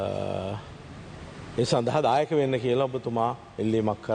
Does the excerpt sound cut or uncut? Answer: uncut